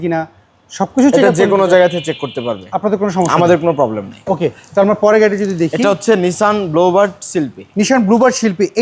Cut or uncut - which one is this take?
uncut